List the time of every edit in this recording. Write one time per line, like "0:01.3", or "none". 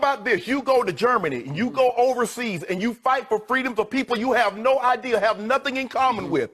none

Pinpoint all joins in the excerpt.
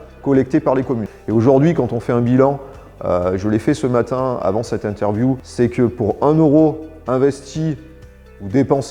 0:01.1
0:05.5

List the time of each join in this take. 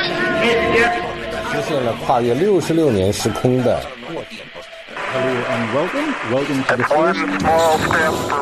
none

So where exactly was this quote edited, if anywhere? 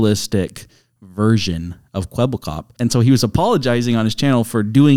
0:02.7

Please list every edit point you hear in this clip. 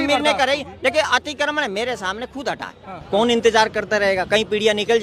0:02.9

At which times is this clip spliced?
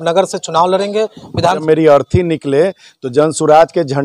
0:01.6

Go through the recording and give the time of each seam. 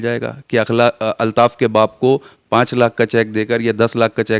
none

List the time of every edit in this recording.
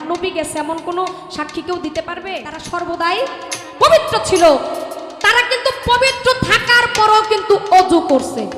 0:02.5

